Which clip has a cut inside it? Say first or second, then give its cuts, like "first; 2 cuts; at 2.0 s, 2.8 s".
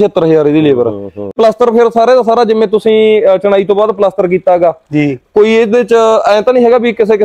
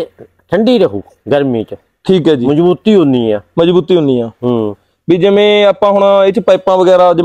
first; 1 cut; at 1.3 s